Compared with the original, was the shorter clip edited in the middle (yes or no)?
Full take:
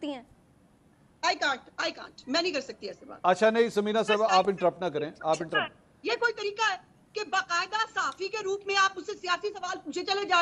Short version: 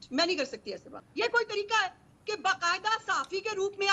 yes